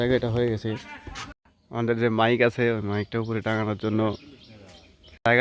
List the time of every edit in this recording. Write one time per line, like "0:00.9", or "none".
none